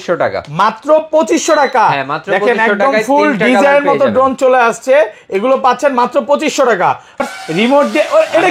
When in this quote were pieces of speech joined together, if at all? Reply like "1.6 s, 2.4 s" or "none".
7.2 s